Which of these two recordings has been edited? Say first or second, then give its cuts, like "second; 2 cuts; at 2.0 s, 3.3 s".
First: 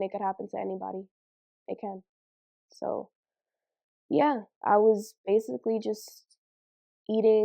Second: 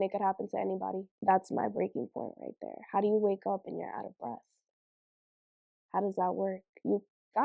second; 1 cut; at 1.1 s